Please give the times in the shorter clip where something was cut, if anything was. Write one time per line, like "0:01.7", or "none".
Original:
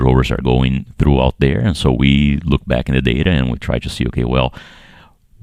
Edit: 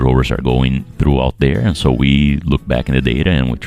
none